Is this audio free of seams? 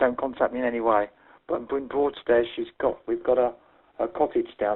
yes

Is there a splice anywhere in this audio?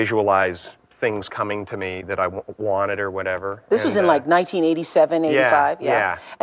no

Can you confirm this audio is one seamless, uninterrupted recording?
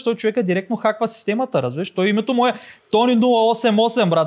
yes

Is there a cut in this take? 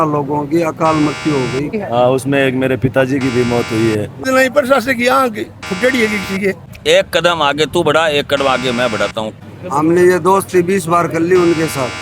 yes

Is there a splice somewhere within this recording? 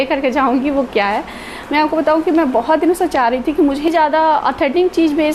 yes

